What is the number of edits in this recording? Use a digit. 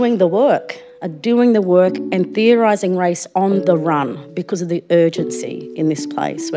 0